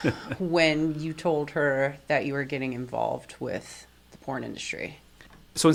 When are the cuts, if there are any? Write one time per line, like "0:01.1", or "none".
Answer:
none